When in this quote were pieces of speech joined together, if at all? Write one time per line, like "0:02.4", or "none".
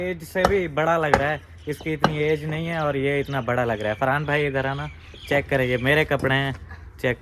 none